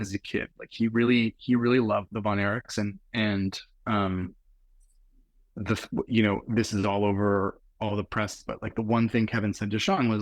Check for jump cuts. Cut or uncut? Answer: uncut